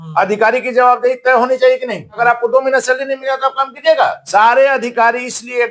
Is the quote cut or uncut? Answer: cut